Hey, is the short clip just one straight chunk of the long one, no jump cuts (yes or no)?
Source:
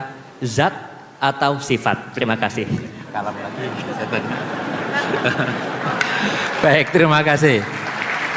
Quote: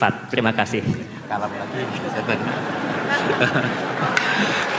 yes